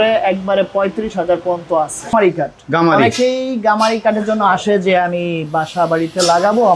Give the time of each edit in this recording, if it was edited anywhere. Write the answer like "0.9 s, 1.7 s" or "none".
2.1 s

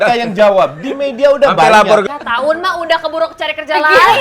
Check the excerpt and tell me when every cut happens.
2.1 s

